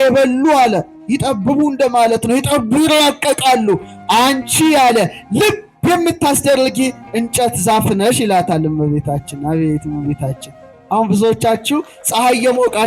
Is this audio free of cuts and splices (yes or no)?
yes